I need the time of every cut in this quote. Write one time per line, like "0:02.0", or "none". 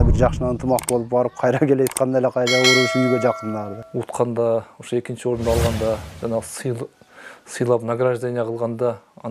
0:03.8